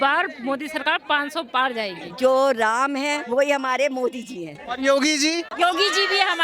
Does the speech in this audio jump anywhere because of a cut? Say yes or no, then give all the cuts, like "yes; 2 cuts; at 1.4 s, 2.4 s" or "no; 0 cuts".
yes; 1 cut; at 2.0 s